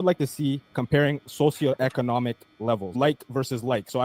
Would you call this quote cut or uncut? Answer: cut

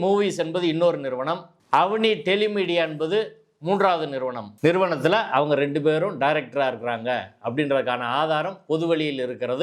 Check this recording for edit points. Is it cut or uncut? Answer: cut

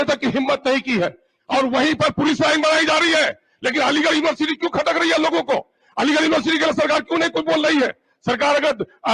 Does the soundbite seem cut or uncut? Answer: cut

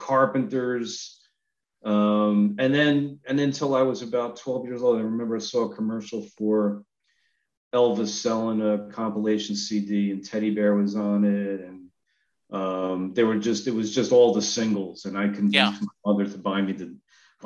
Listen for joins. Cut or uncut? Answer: uncut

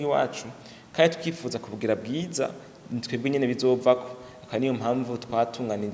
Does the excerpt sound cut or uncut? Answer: uncut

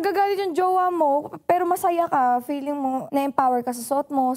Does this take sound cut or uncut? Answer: cut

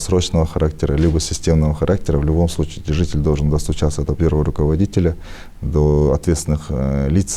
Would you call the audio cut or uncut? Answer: uncut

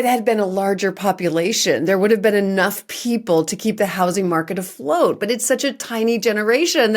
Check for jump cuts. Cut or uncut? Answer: uncut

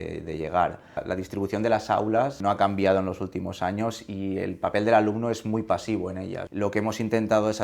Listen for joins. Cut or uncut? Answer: cut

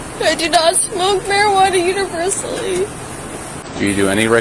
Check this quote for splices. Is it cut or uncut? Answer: uncut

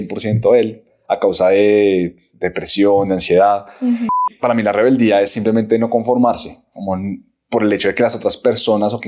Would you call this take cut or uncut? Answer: cut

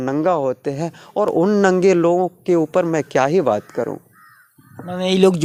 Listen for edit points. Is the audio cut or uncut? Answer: uncut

